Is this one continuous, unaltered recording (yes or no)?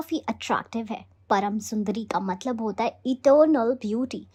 yes